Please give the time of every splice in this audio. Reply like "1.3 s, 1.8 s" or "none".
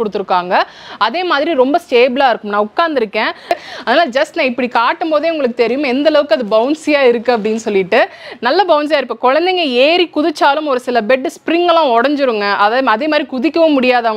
3.5 s